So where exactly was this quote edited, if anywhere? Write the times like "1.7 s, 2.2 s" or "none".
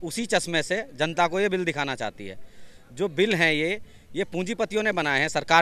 none